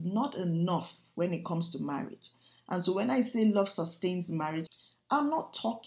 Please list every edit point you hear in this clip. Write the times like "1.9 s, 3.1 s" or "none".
4.7 s